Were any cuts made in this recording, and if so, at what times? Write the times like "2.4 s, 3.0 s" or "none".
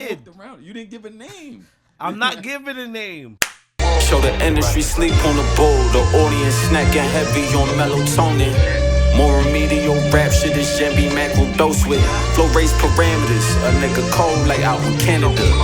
3.3 s